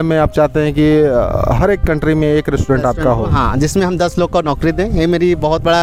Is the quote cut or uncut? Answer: uncut